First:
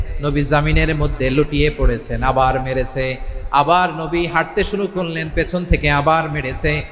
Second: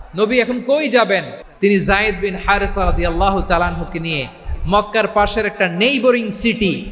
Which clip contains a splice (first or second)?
second